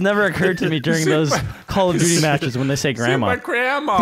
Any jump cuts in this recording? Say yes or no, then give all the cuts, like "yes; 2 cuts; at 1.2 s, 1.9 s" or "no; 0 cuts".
no; 0 cuts